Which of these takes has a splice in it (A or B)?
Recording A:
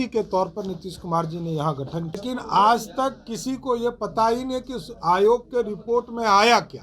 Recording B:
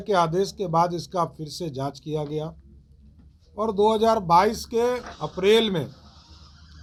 A